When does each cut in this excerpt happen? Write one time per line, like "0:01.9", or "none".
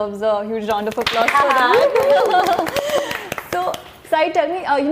none